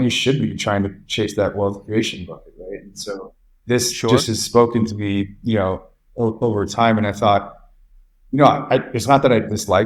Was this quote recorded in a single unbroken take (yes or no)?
yes